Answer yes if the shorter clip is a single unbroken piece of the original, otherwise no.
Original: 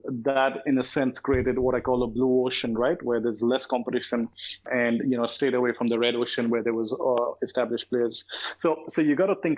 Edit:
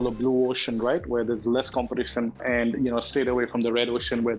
no